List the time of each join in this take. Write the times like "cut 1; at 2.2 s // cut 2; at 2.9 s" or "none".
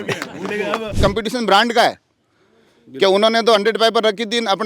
cut 1; at 1.0 s